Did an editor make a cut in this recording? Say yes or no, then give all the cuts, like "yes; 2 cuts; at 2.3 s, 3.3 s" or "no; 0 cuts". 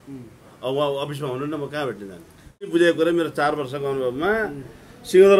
yes; 1 cut; at 2.7 s